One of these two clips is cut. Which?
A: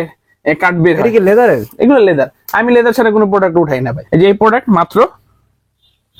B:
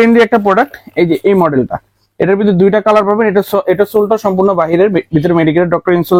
A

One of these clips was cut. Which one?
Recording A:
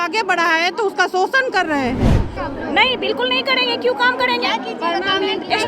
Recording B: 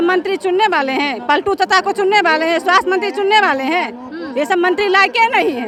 A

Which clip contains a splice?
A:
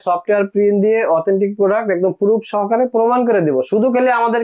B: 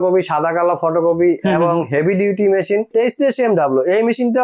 B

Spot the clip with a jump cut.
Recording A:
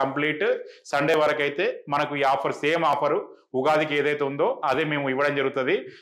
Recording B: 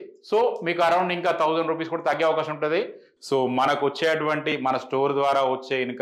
B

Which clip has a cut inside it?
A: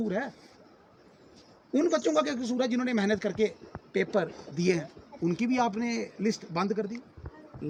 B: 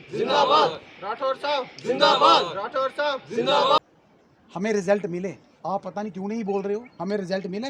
B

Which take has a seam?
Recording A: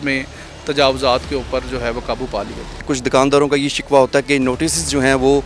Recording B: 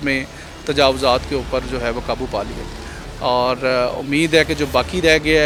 A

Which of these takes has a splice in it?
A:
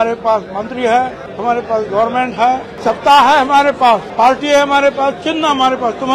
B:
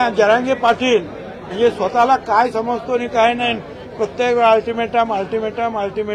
A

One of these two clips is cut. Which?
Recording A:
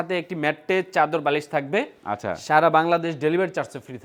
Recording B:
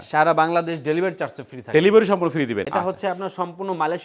B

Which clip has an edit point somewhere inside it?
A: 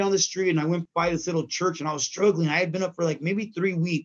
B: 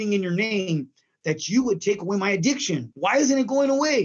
B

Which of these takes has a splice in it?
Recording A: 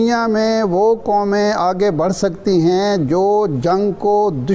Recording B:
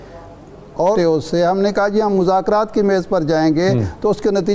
B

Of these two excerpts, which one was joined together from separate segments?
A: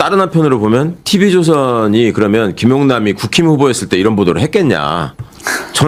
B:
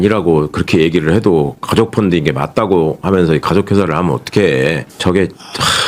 B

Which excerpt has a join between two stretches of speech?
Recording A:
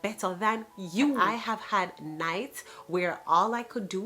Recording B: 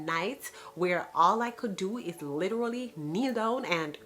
A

